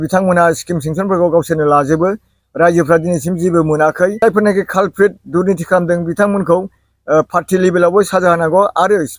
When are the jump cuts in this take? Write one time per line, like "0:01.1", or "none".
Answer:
0:04.2